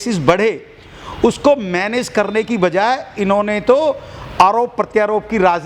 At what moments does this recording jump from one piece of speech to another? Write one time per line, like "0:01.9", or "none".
none